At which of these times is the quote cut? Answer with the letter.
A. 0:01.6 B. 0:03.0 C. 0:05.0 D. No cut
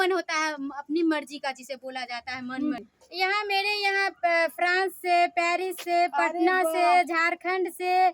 B